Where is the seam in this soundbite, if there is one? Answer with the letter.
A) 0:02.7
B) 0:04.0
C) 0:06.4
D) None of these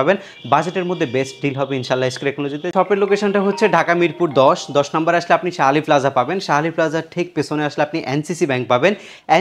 A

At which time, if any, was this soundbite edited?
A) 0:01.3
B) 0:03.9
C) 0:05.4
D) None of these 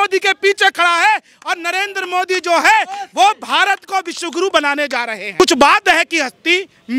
C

